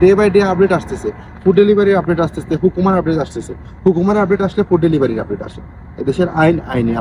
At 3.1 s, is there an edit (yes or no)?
no